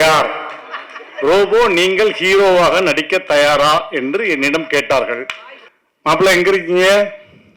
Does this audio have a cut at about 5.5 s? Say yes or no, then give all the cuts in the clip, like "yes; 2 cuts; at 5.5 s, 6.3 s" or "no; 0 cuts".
yes; 1 cut; at 5.5 s